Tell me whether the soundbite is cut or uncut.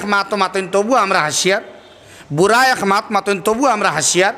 uncut